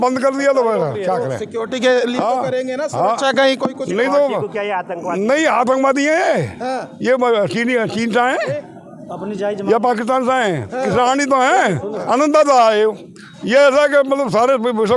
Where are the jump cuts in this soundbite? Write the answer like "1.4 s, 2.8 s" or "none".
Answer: none